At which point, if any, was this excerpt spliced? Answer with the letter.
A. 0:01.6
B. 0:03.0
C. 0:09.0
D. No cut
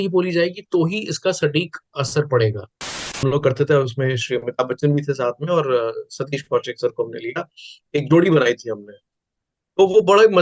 B